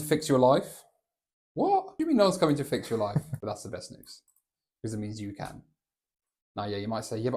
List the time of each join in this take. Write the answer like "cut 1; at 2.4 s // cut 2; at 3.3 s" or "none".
cut 1; at 1.9 s // cut 2; at 3.3 s